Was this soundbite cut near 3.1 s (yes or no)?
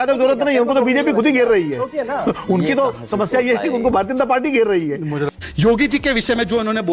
no